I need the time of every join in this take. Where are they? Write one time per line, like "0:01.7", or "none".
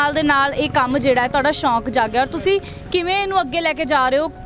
none